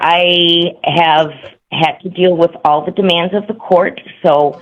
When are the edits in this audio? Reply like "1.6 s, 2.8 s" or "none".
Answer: none